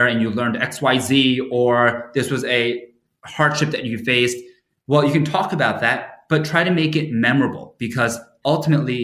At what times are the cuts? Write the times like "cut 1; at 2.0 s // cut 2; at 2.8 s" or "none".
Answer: none